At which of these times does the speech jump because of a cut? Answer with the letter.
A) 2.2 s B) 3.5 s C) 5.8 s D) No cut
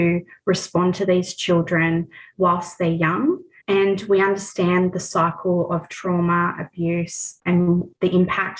A